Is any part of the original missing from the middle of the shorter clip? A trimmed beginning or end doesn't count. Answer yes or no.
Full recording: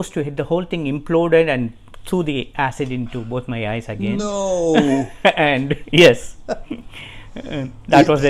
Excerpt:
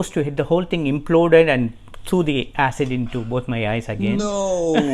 no